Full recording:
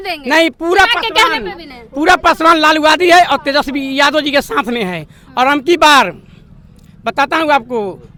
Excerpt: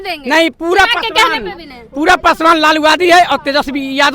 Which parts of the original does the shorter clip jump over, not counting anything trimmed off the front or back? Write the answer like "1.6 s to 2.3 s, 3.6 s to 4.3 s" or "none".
none